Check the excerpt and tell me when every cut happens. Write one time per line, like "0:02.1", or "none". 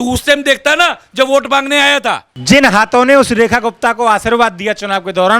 0:02.3